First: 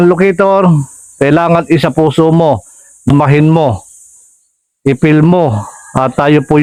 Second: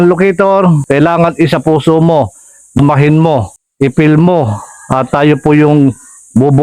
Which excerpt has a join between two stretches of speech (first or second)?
second